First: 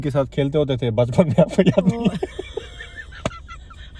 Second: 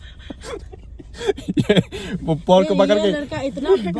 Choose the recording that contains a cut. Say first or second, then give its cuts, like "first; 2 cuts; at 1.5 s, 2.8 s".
first; 1 cut; at 2.9 s